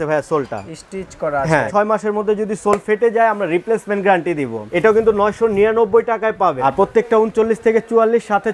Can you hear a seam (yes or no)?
yes